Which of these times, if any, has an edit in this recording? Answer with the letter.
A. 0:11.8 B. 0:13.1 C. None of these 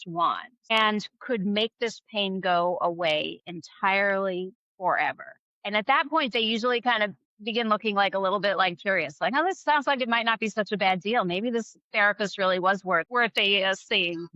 B